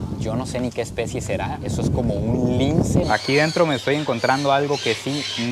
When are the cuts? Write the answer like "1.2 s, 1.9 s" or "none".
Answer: 3.1 s